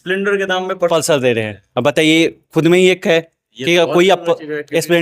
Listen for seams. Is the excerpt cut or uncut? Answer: uncut